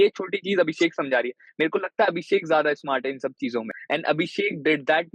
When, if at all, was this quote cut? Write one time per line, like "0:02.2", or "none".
0:03.8